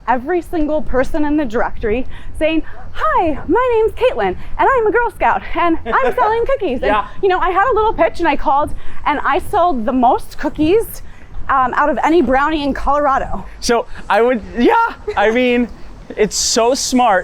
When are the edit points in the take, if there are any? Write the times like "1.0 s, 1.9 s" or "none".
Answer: none